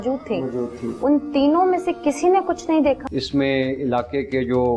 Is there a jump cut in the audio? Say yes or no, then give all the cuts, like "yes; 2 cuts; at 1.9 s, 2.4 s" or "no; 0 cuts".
yes; 1 cut; at 3.0 s